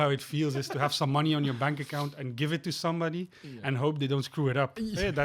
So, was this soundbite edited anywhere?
no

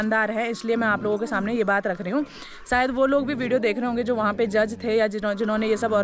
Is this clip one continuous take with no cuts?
yes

